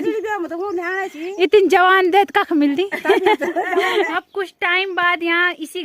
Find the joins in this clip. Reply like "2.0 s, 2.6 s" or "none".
4.1 s